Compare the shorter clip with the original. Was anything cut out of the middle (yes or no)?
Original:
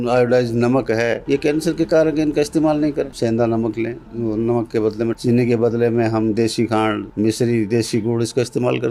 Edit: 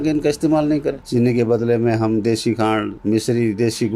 yes